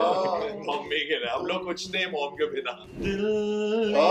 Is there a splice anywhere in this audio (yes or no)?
yes